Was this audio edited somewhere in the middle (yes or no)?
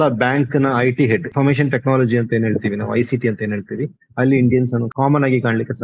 yes